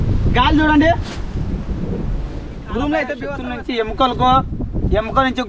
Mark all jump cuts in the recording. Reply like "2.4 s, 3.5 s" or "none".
3.3 s